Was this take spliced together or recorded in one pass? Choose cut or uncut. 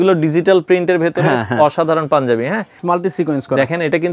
cut